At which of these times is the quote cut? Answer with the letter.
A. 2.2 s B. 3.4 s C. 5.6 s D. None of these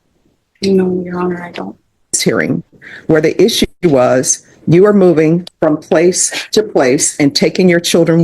A